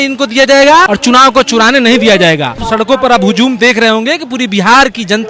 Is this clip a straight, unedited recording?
no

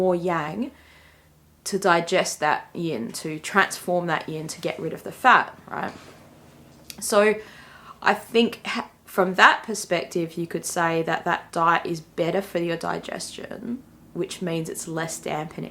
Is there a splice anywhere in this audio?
no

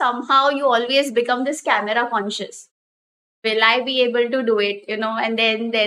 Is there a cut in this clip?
no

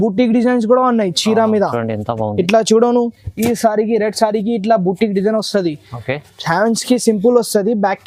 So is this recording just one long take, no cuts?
yes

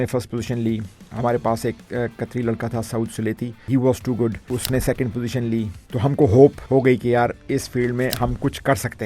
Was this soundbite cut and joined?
yes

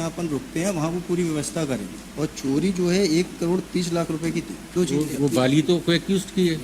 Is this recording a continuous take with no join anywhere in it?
no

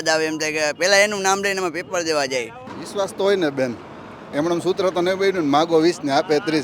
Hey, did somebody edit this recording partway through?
yes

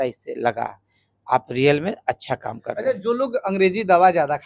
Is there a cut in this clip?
no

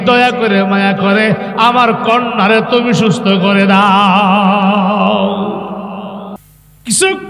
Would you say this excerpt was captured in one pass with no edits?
no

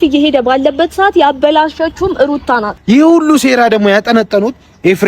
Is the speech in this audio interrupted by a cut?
yes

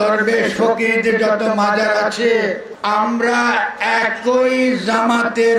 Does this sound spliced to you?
yes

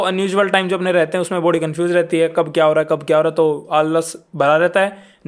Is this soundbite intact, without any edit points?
yes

